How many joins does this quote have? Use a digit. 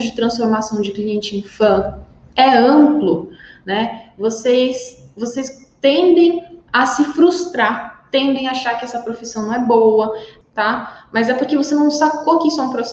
1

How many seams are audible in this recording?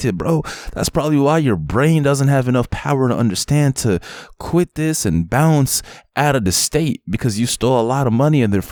0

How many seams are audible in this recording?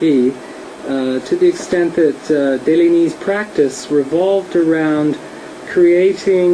1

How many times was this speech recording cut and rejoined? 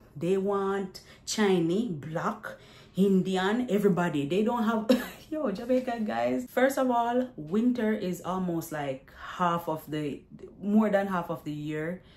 1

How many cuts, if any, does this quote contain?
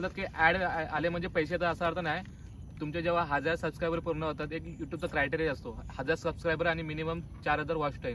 0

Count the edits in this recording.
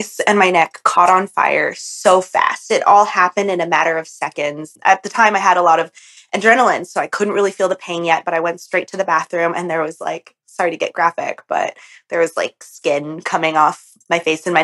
1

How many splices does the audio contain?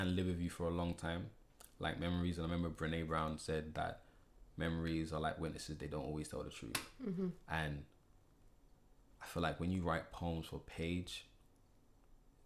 0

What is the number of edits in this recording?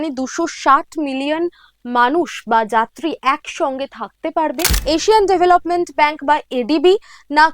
1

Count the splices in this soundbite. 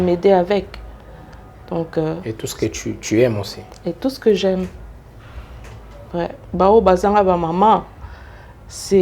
1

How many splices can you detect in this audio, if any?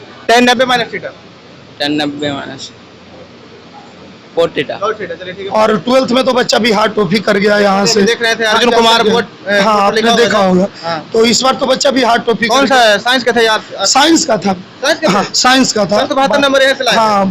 1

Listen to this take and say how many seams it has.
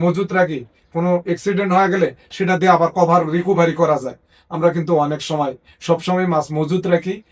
0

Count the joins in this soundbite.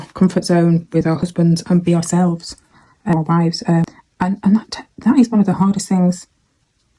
2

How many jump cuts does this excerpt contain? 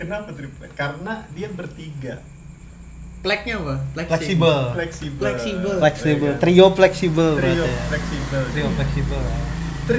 0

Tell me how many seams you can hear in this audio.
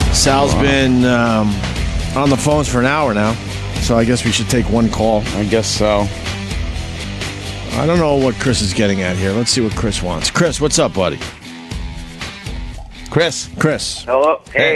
1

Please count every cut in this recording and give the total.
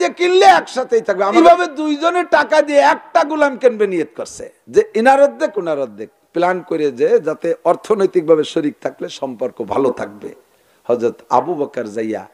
1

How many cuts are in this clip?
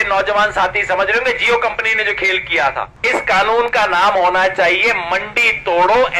1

